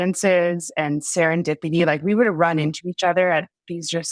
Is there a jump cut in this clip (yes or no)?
no